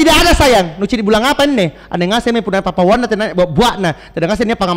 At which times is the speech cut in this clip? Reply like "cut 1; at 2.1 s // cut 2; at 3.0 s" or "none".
none